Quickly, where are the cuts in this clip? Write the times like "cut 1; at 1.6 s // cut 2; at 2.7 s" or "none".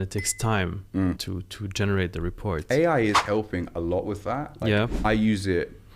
cut 1; at 1.2 s // cut 2; at 5.0 s